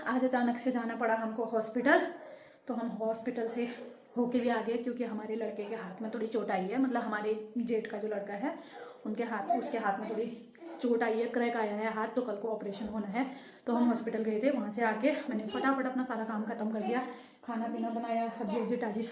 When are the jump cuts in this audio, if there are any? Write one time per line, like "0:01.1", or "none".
none